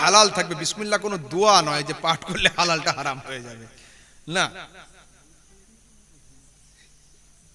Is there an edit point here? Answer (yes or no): no